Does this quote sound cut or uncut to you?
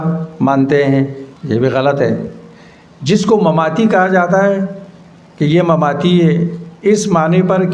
cut